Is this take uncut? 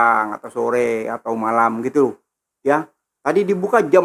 yes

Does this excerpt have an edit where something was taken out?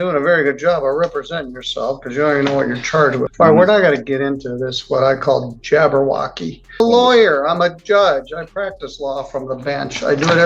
yes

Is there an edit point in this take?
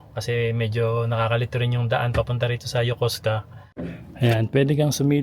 yes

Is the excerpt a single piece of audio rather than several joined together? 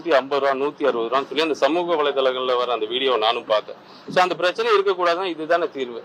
yes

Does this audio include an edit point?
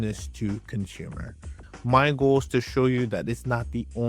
yes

